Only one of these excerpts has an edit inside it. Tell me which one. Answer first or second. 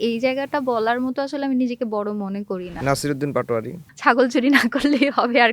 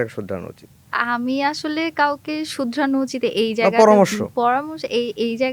first